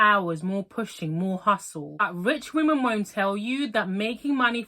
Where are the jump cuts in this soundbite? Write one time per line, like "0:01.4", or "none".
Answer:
0:02.1